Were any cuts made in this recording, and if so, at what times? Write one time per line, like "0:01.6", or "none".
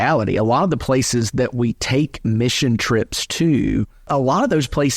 0:04.1